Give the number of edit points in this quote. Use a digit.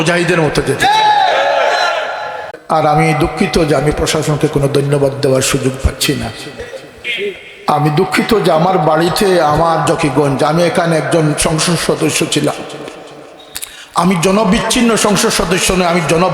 1